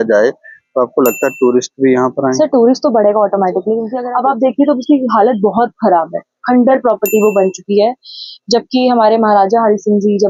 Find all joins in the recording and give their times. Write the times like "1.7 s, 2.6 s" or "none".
3.9 s